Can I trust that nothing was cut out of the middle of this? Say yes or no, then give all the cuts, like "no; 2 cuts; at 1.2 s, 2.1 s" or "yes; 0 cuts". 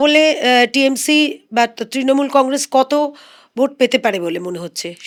yes; 0 cuts